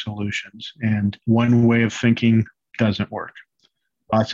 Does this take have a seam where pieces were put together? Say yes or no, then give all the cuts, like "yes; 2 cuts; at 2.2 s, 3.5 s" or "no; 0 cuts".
yes; 2 cuts; at 1.2 s, 2.6 s